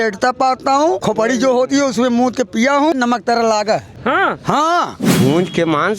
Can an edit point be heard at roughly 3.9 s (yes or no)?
yes